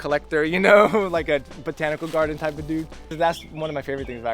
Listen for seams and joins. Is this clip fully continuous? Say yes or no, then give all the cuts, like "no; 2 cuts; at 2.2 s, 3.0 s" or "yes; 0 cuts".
no; 1 cut; at 3.1 s